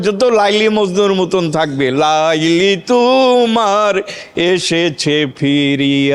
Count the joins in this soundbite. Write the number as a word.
zero